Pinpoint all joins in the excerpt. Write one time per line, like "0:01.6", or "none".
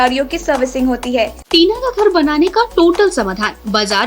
0:01.4